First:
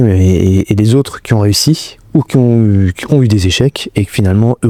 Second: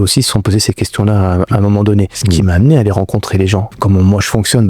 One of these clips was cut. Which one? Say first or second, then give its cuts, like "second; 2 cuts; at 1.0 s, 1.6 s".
second; 2 cuts; at 2.2 s, 3.7 s